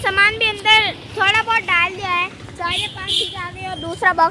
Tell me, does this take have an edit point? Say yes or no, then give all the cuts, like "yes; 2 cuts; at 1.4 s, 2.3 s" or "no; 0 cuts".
no; 0 cuts